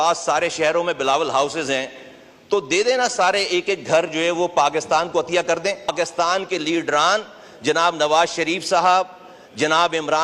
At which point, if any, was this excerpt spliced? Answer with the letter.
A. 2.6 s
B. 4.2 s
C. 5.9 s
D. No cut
C